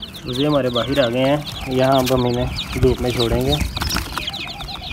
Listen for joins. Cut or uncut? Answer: uncut